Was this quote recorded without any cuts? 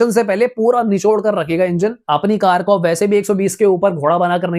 no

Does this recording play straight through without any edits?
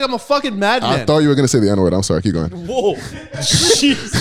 yes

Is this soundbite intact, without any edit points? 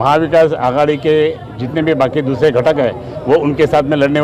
yes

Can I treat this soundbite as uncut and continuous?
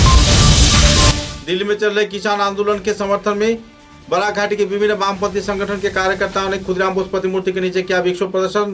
yes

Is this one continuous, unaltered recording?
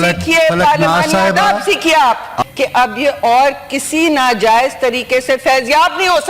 no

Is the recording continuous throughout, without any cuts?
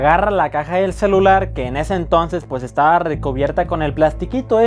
yes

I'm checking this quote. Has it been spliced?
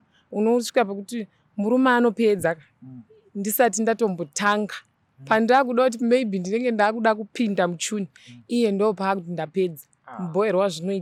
no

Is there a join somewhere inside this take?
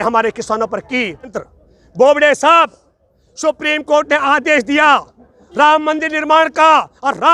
yes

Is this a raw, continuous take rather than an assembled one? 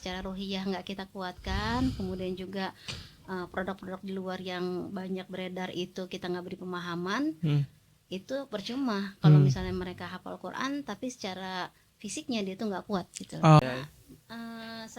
no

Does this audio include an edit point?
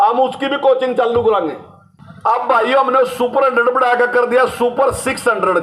yes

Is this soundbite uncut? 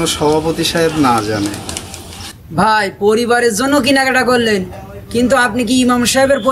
no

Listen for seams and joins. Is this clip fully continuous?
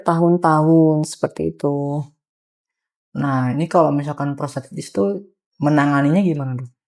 yes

